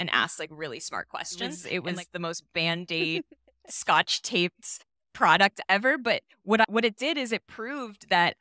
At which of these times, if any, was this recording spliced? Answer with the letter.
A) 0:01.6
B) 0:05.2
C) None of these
A